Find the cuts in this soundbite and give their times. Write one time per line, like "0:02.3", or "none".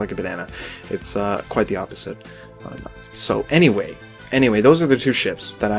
0:01.3